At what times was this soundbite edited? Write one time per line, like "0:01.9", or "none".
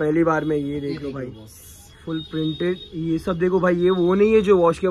none